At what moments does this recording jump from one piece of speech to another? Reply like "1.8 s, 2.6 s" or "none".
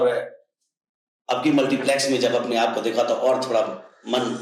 none